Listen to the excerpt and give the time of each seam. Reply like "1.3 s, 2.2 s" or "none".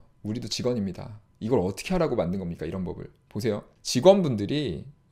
3.7 s